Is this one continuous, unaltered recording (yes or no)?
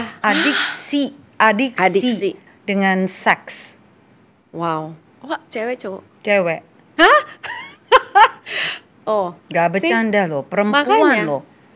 no